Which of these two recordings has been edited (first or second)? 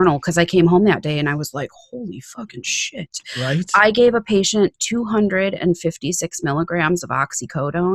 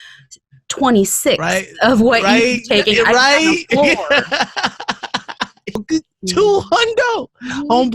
second